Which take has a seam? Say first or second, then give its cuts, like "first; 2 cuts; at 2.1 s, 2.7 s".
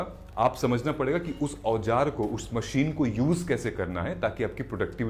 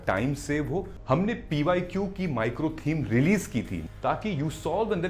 second; 2 cuts; at 0.9 s, 3.8 s